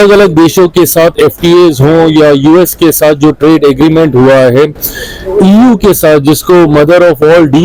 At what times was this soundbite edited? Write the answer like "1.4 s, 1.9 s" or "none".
none